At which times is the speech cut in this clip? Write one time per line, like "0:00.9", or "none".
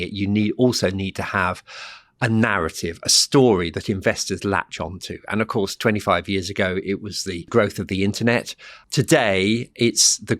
0:07.4
0:08.8